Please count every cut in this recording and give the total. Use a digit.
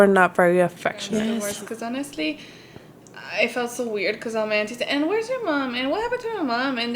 1